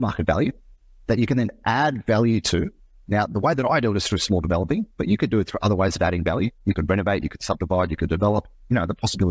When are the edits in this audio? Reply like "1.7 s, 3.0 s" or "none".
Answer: none